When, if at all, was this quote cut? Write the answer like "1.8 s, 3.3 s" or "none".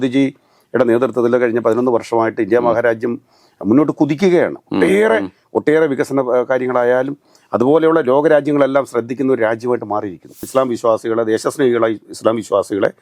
10.5 s